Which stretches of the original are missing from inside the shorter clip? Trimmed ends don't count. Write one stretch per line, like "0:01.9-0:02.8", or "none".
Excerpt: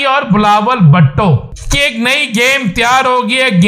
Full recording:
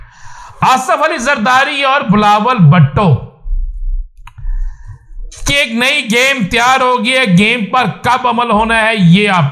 0:03.4-0:05.3